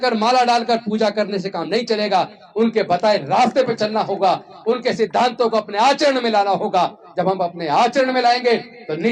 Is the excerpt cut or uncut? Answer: uncut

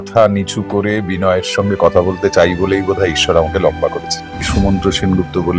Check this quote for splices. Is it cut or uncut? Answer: cut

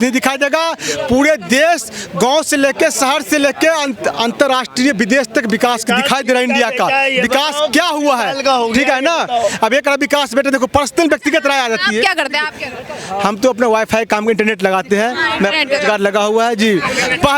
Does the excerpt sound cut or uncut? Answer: uncut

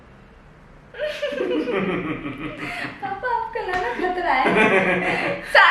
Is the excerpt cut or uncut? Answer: uncut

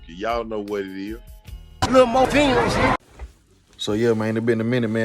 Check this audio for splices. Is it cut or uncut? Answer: cut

